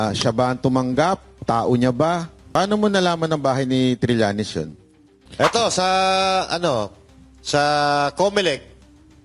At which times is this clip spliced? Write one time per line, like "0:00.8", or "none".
0:02.5
0:05.2